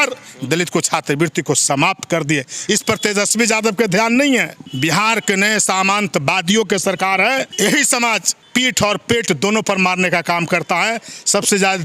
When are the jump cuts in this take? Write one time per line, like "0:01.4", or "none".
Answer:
0:04.6
0:07.5
0:08.3